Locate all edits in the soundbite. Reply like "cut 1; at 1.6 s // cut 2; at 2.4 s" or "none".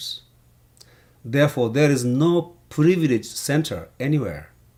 none